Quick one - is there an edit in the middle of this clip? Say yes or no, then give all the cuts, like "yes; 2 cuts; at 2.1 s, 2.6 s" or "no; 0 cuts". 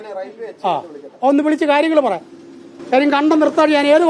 no; 0 cuts